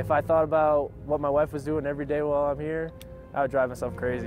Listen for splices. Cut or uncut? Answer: uncut